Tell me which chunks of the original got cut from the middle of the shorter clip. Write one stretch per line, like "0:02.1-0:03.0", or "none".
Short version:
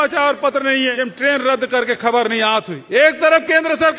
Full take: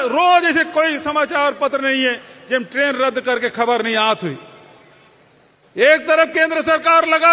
0:02.2-0:02.6
0:04.3-0:05.6